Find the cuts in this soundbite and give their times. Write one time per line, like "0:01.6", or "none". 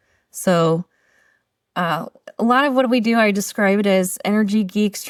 none